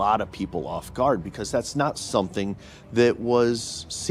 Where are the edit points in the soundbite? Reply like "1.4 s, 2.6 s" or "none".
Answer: 1.4 s